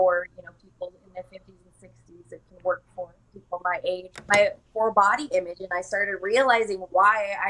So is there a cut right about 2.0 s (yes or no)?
no